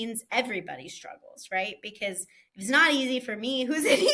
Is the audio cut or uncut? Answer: uncut